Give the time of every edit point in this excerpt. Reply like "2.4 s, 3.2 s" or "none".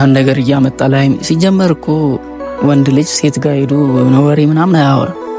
none